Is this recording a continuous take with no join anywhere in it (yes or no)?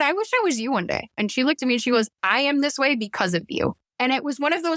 no